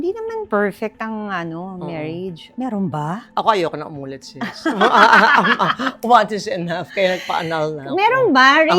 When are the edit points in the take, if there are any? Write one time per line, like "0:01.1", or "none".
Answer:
none